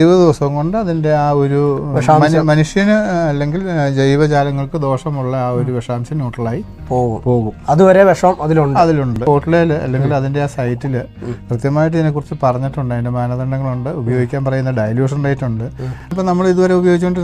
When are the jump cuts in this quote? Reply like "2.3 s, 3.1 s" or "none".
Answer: 9.2 s, 16.1 s

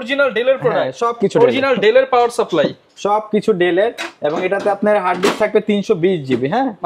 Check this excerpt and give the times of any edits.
none

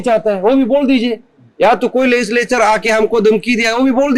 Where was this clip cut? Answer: none

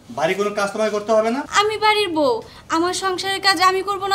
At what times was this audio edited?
1.5 s

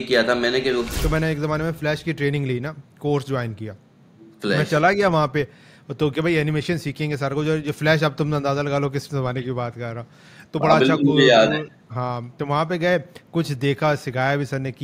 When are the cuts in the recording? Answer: 0.9 s

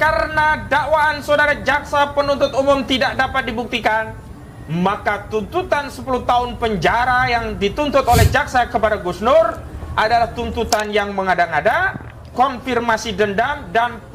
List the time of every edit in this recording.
none

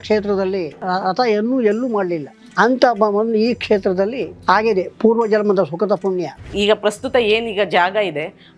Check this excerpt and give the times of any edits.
6.4 s

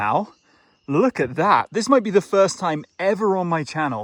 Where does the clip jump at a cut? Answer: none

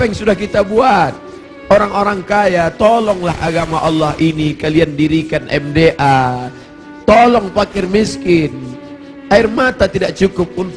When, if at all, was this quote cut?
none

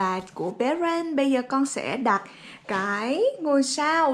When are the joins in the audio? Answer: none

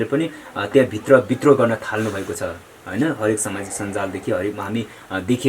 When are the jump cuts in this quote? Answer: none

